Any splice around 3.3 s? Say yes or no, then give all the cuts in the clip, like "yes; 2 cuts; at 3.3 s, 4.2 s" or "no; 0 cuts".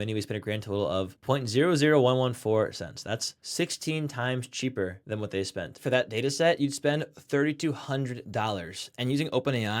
yes; 2 cuts; at 3.3 s, 5.8 s